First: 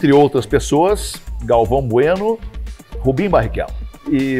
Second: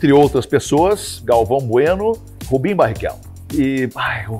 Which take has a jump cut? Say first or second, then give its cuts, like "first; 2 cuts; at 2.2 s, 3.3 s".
second; 2 cuts; at 1.1 s, 2.3 s